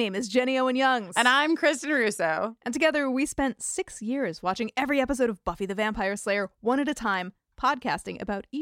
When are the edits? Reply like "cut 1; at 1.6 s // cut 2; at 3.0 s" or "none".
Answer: none